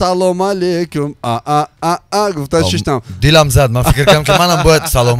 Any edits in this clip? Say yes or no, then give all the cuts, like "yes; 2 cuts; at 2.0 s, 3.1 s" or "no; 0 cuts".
no; 0 cuts